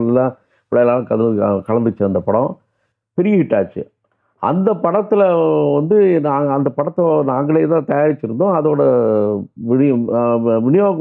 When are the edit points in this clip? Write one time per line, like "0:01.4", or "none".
none